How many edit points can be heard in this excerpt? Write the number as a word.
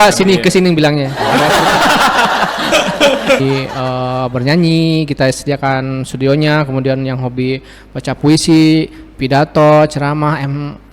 one